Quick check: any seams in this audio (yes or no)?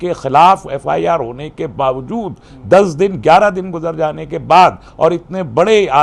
no